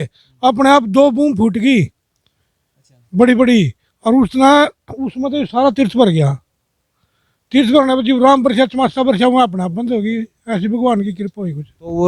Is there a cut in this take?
no; 0 cuts

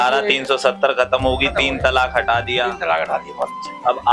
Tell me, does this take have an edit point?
no; 0 cuts

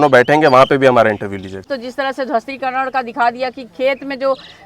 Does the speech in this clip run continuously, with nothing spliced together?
no; 1 cut; at 1.7 s

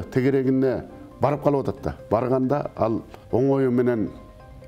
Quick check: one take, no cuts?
no; 1 cut; at 3.1 s

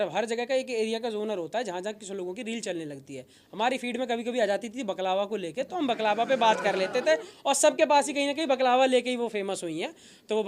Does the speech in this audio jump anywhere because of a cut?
no; 0 cuts

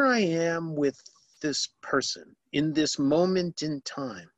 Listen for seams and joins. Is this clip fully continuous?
yes; 0 cuts

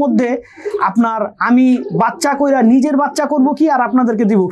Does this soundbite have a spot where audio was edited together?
no; 0 cuts

